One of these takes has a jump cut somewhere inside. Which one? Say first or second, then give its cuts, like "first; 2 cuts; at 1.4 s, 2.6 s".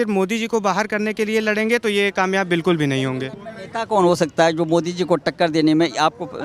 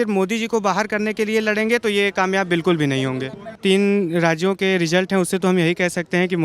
second; 1 cut; at 3.6 s